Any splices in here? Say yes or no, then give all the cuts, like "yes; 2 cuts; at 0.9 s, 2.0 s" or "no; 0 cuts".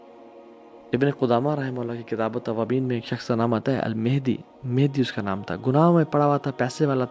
yes; 1 cut; at 0.9 s